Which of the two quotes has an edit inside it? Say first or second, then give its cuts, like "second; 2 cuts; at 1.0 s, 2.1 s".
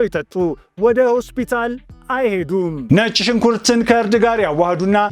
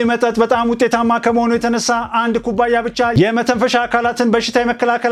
first; 1 cut; at 2.8 s